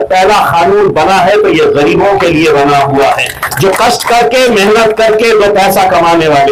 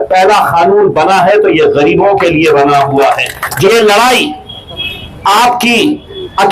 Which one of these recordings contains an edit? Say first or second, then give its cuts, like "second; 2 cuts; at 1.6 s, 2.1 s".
second; 1 cut; at 3.7 s